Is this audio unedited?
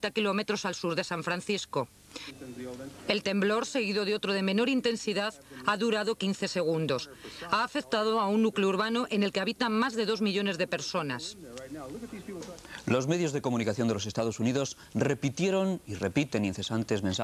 no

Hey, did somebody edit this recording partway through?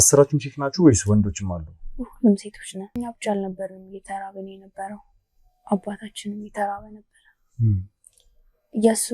yes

